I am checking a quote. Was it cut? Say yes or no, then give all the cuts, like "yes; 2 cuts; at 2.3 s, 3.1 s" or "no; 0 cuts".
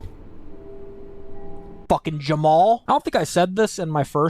no; 0 cuts